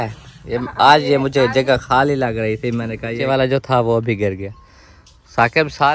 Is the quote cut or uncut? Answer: cut